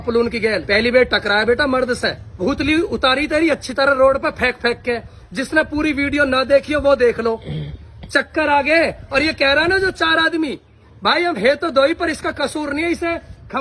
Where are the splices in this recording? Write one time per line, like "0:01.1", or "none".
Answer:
0:02.4